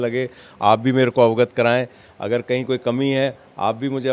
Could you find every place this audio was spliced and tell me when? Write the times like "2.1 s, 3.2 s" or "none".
none